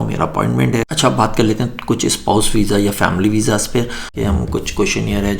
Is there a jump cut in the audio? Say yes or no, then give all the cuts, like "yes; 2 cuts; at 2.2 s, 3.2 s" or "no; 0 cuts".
yes; 2 cuts; at 0.8 s, 4.1 s